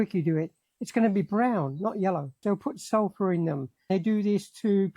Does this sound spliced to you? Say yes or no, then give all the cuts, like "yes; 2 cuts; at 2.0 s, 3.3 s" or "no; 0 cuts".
yes; 2 cuts; at 2.4 s, 3.9 s